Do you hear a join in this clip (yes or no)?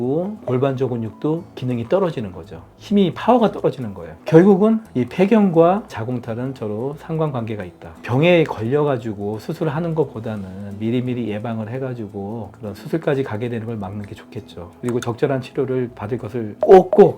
yes